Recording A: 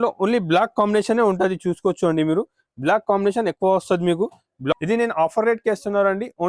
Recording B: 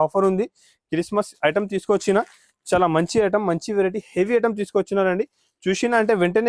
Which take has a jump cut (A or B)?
A